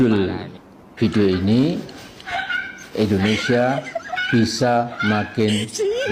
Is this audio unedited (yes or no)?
yes